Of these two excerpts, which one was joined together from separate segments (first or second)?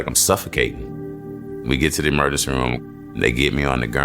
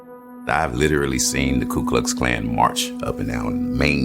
first